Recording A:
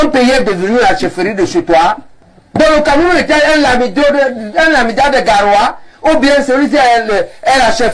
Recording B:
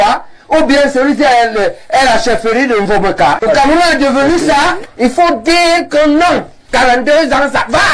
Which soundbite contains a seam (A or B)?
B